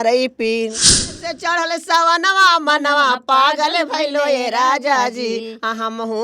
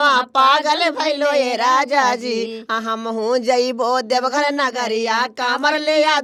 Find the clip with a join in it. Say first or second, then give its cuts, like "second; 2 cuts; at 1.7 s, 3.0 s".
first; 1 cut; at 1.2 s